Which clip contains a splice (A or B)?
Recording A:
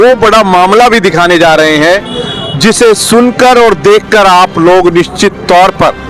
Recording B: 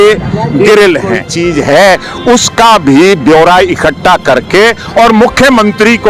B